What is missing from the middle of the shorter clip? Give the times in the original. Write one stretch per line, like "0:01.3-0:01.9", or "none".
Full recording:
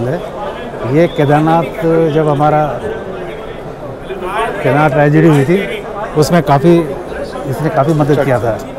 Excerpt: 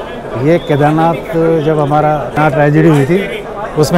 0:02.9-0:04.8

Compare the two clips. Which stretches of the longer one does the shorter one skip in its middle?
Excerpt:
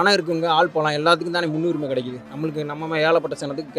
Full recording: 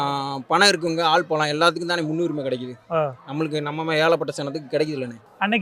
0:02.8-0:03.2

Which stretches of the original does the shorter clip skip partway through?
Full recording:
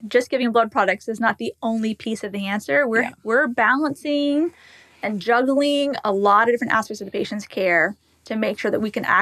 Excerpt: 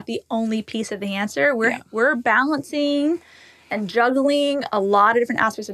none

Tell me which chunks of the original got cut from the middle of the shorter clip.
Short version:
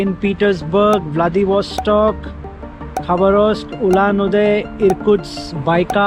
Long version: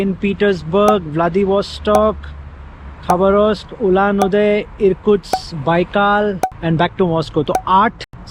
none

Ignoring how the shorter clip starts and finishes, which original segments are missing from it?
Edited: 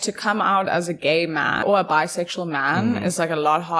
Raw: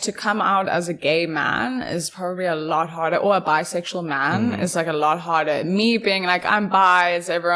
0:01.6-0:03.2

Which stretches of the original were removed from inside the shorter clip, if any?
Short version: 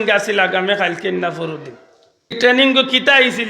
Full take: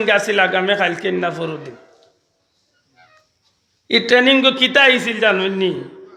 0:02.4-0:04.0

